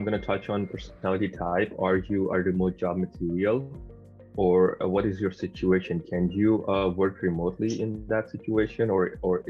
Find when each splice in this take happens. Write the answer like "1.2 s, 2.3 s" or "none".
none